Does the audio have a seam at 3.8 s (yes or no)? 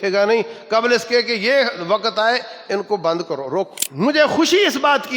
yes